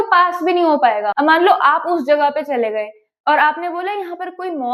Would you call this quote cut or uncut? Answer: cut